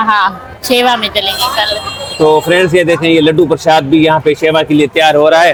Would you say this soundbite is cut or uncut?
uncut